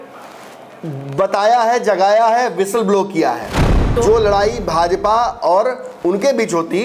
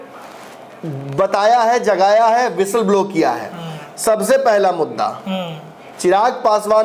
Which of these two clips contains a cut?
first; 1 cut; at 3.9 s

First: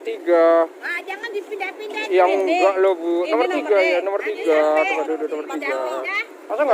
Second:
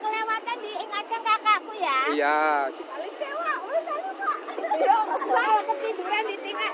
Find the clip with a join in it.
second; 2 cuts; at 2.8 s, 5.5 s

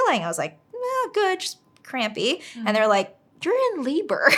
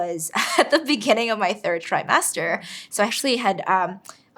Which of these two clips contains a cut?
second; 1 cut; at 3.1 s

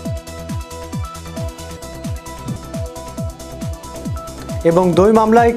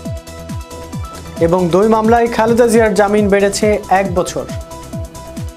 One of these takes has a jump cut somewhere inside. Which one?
second; 2 cuts; at 1.4 s, 4.5 s

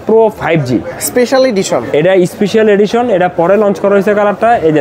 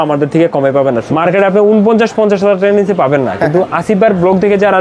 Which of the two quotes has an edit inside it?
second; 1 cut; at 1.1 s

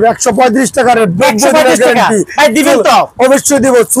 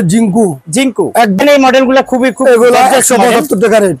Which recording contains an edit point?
second; 1 cut; at 1.4 s

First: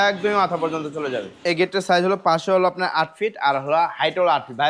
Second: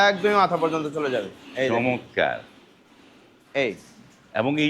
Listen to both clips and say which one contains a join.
first; 1 cut; at 1.4 s

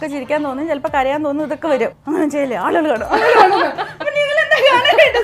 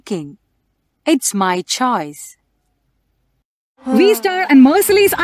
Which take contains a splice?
first; 1 cut; at 2.0 s

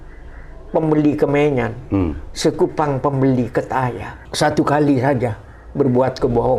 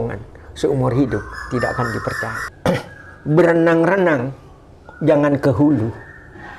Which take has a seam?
second; 1 cut; at 2.4 s

